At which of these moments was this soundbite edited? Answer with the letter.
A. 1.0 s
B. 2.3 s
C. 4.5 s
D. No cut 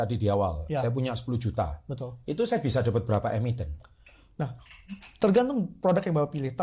D